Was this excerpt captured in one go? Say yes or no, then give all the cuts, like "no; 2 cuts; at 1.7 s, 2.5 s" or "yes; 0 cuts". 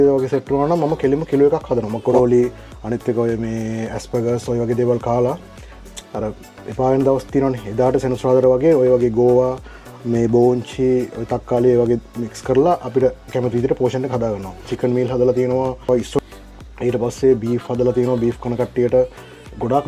no; 3 cuts; at 2.1 s, 14.7 s, 16.1 s